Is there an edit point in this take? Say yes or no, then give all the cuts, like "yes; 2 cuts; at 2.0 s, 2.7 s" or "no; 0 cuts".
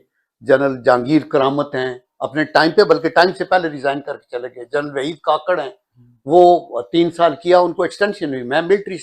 no; 0 cuts